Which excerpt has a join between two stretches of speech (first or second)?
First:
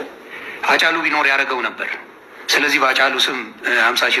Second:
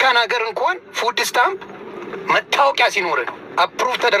first